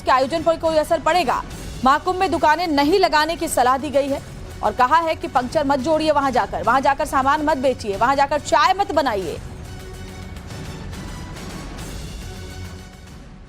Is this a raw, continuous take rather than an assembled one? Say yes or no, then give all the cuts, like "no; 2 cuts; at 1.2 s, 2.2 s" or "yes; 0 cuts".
no; 1 cut; at 8.0 s